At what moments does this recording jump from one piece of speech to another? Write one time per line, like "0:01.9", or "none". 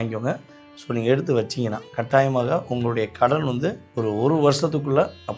0:01.9
0:03.8